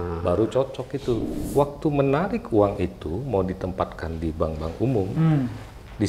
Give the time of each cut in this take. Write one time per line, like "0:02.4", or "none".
0:01.3